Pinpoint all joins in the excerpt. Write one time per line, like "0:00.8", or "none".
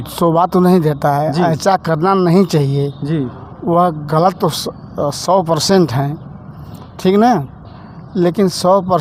none